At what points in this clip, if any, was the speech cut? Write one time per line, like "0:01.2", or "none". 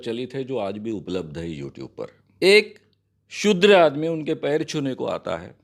0:02.2

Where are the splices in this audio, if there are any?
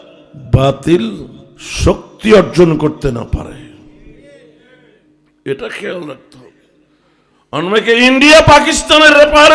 none

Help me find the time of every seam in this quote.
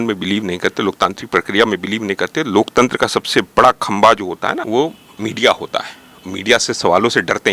0:04.6

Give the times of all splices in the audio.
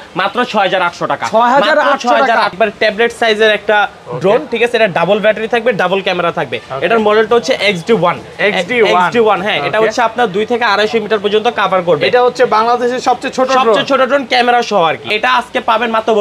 0:02.5
0:15.1

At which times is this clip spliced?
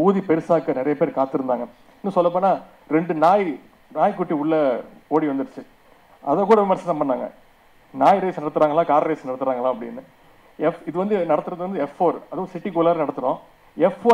none

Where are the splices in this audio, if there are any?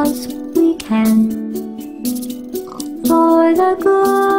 0:02.7

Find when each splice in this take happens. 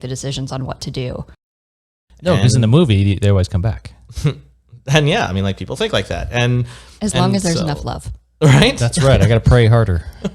0:01.6

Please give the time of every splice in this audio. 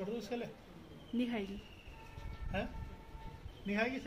none

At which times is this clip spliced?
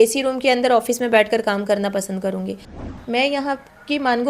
0:02.8

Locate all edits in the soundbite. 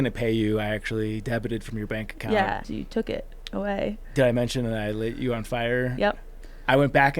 0:02.7

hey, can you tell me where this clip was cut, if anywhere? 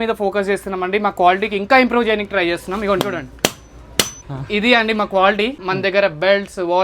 0:04.2
0:05.6

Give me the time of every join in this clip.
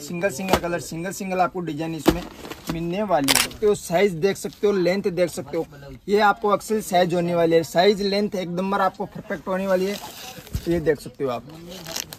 0:03.5

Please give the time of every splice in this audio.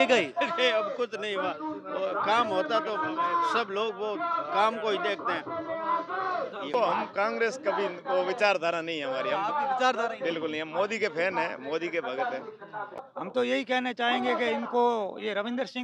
0:06.7
0:12.9

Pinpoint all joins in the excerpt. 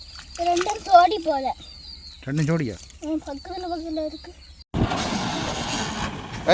0:04.6

